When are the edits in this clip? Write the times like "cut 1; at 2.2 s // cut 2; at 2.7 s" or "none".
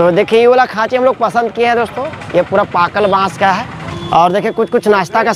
cut 1; at 3.8 s